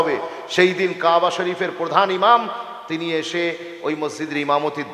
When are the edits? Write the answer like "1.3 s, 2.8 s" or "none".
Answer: none